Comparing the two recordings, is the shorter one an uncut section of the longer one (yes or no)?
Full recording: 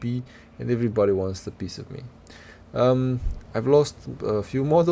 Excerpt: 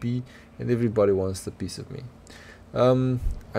yes